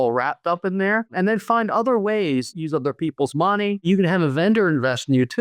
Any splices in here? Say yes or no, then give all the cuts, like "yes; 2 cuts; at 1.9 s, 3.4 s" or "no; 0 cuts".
yes; 3 cuts; at 1.1 s, 2.5 s, 3.9 s